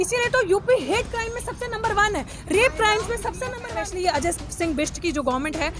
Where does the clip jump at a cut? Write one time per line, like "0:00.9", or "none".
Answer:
0:03.7